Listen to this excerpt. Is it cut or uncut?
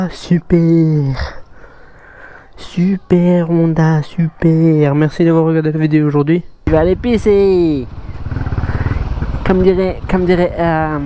cut